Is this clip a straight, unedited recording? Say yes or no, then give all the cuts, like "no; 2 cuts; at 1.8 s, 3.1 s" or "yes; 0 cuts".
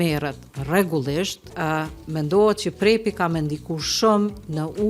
no; 1 cut; at 1.5 s